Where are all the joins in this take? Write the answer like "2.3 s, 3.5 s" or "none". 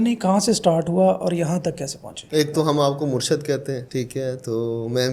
none